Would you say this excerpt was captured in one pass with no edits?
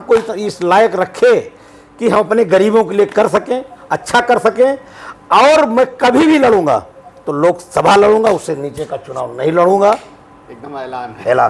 yes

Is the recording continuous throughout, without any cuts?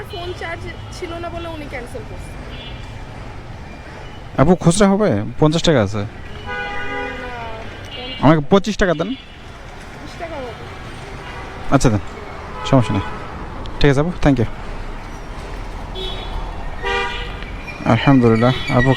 yes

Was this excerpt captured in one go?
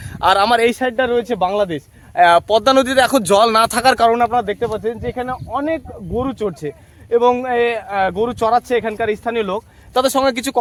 yes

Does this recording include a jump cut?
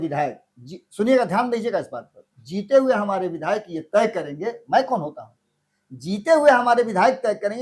no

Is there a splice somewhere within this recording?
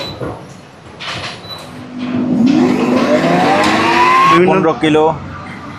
yes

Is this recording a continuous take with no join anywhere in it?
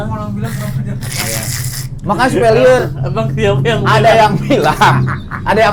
yes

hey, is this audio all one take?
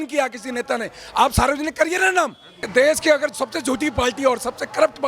no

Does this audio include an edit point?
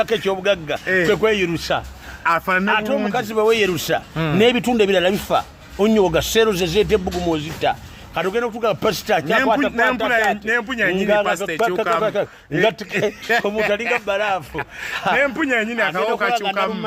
no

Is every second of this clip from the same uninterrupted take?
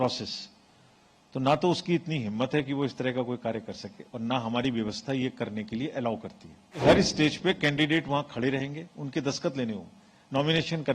no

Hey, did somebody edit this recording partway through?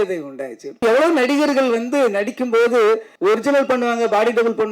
yes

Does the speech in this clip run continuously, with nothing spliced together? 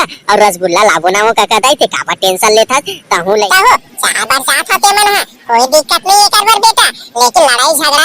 no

